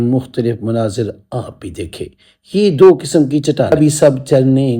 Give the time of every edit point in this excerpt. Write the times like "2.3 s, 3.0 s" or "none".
3.7 s